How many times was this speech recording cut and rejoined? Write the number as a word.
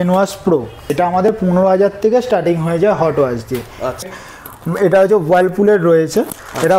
two